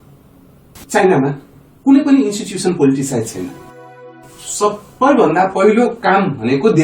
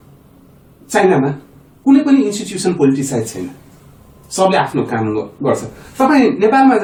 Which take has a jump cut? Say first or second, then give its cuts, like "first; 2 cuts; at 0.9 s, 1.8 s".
first; 1 cut; at 4.2 s